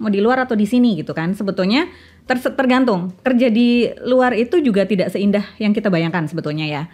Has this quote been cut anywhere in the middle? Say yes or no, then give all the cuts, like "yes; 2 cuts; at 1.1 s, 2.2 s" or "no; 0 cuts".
no; 0 cuts